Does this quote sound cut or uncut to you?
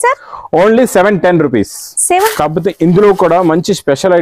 cut